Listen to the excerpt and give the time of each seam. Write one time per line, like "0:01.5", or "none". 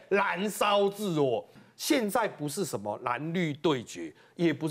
0:01.6